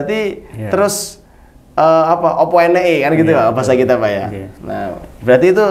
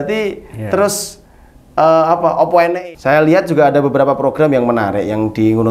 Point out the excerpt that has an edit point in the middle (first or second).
second